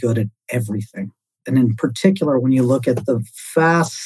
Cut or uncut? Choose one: uncut